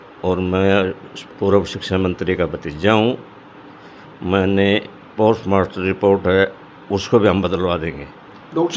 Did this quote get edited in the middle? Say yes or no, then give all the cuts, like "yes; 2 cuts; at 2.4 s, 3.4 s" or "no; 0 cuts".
no; 0 cuts